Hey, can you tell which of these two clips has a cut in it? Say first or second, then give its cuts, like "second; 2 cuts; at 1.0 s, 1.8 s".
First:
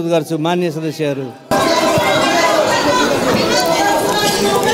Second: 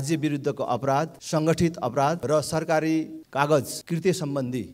second; 4 cuts; at 1.2 s, 2.2 s, 3.2 s, 3.8 s